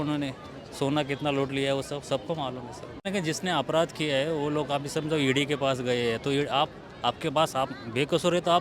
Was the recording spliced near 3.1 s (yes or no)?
yes